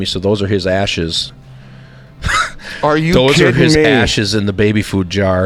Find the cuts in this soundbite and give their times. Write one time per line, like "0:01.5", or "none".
none